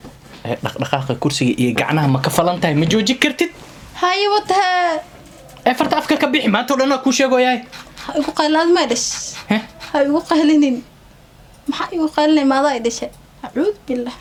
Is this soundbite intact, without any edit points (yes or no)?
yes